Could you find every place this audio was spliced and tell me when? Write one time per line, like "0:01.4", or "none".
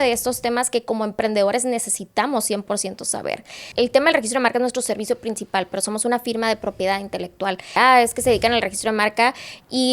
0:03.7
0:07.8